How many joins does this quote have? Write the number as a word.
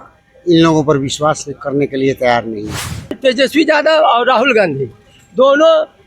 one